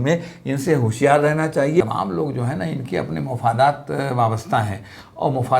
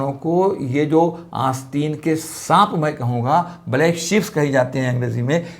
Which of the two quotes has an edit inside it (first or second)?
first